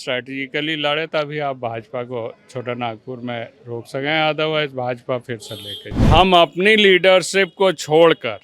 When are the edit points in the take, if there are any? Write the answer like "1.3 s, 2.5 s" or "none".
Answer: 6.1 s